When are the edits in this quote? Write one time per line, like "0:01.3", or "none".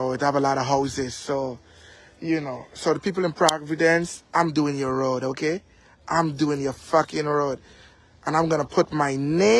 none